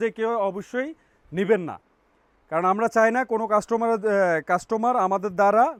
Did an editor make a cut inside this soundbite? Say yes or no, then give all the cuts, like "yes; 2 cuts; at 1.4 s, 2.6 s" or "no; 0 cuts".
no; 0 cuts